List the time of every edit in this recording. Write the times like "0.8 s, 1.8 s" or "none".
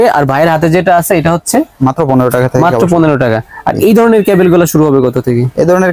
none